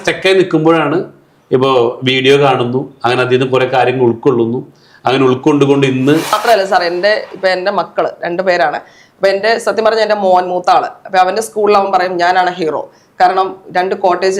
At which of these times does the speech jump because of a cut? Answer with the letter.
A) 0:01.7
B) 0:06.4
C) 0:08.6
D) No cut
B